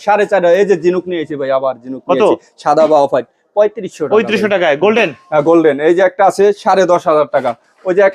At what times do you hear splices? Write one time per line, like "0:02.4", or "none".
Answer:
none